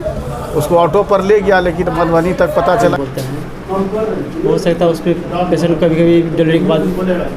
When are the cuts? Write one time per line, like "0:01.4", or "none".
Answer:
0:02.9